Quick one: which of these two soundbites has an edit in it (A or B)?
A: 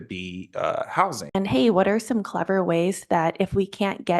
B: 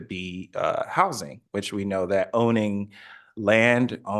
A